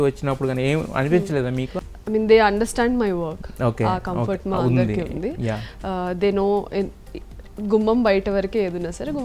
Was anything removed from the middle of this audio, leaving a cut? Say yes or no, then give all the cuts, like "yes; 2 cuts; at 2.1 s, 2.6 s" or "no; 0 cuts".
yes; 1 cut; at 1.7 s